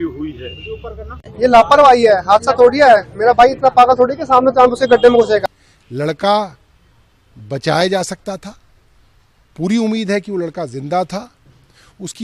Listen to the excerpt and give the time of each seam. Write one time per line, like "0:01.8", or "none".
0:01.2
0:05.4